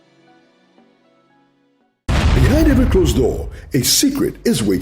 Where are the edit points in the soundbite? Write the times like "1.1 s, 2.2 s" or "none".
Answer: 1.9 s